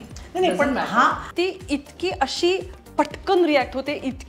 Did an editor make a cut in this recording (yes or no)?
yes